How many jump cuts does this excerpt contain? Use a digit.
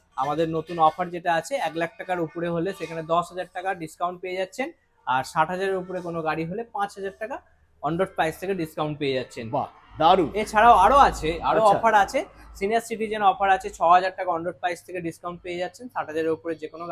0